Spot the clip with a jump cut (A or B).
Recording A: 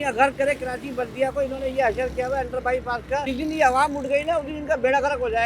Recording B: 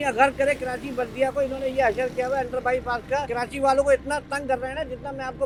A